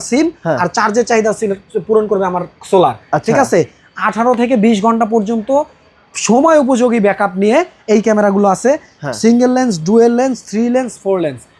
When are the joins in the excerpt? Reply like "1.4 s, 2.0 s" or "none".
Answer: none